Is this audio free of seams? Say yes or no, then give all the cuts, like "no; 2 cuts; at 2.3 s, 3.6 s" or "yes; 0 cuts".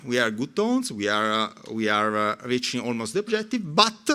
yes; 0 cuts